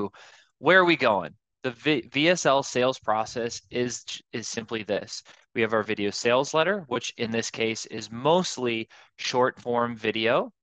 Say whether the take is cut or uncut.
uncut